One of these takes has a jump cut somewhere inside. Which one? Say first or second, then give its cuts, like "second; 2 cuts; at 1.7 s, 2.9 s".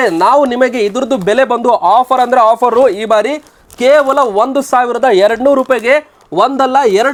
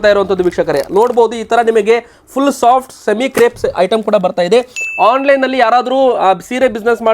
second; 1 cut; at 4.8 s